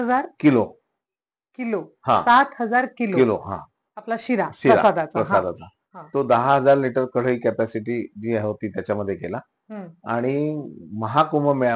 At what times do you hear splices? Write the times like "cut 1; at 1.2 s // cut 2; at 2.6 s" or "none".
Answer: none